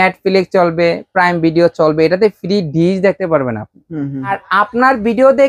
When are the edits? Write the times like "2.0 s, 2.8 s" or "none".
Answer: 4.4 s